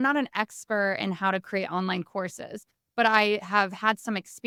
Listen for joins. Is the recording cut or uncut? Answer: uncut